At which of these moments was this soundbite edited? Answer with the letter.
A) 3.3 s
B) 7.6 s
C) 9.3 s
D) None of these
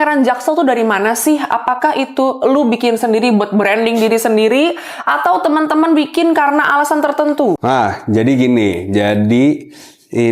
B